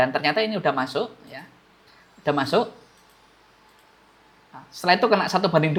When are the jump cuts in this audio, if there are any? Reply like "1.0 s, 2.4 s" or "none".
none